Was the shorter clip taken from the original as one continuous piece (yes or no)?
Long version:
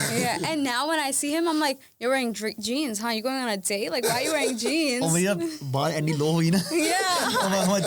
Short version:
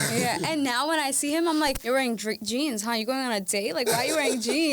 no